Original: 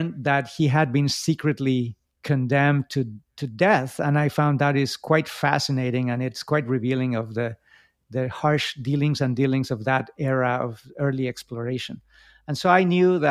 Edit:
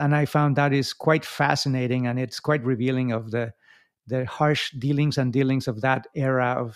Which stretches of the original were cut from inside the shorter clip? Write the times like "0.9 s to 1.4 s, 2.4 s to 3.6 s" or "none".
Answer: none

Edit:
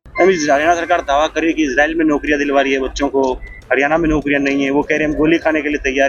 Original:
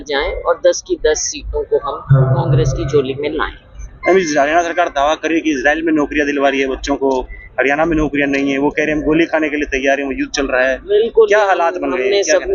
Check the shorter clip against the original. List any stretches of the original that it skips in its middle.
none

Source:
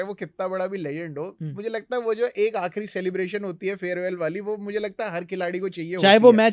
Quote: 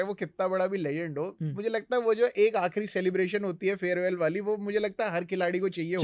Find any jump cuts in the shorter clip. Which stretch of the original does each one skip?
none

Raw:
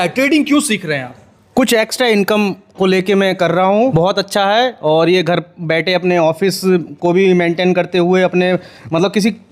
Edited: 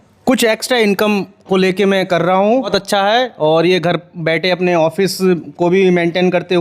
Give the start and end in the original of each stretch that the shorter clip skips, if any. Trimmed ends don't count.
3.9 s to 4.1 s

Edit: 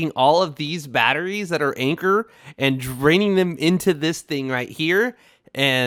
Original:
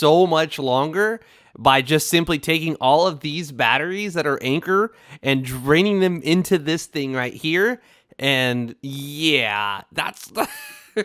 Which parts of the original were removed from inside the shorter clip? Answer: none

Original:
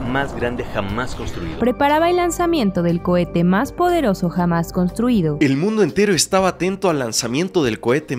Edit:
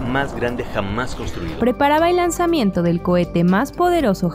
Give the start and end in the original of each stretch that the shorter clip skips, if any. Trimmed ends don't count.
none

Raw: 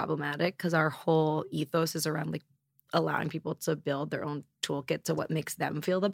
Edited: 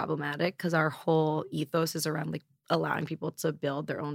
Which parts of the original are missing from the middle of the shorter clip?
2.5 s to 2.7 s

